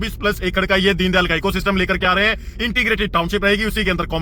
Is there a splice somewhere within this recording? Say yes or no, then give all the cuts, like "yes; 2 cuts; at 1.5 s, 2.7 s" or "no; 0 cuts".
no; 0 cuts